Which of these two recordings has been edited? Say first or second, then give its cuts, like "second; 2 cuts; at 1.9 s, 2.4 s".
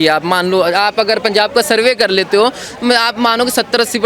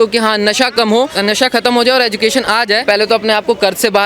second; 2 cuts; at 1.1 s, 2.8 s